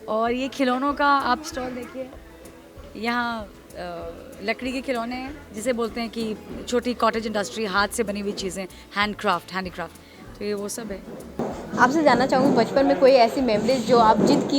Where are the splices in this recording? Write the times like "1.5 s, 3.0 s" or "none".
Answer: none